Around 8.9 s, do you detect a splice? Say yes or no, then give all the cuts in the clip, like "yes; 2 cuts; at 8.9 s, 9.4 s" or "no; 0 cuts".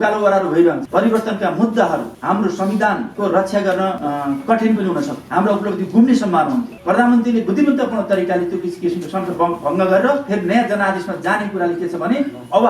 no; 6 cuts; at 0.8 s, 2.1 s, 3.1 s, 4.0 s, 5.2 s, 6.7 s